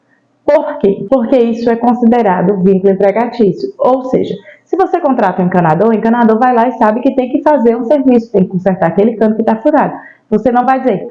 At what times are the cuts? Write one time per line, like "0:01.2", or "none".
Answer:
0:01.0